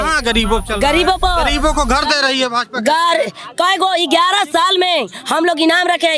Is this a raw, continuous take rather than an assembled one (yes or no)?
yes